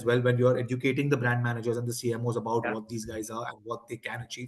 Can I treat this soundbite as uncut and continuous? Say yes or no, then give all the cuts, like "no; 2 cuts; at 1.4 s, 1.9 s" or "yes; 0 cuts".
yes; 0 cuts